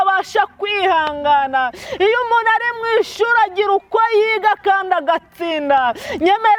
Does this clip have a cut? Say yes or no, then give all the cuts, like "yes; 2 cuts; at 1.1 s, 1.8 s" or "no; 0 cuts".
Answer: no; 0 cuts